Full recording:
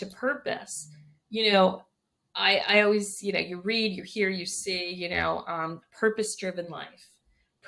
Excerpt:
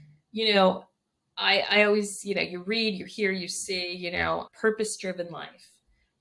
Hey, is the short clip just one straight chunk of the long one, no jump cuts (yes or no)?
no